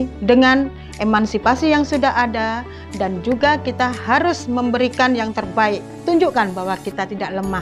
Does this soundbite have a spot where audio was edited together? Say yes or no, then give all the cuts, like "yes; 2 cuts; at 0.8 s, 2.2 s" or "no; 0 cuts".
no; 0 cuts